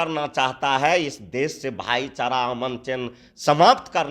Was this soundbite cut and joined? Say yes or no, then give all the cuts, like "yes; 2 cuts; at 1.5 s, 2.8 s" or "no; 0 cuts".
no; 0 cuts